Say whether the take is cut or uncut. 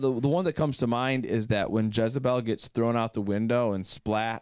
uncut